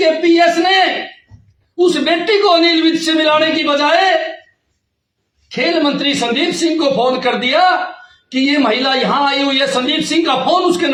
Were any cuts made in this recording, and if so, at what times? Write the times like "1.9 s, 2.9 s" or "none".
none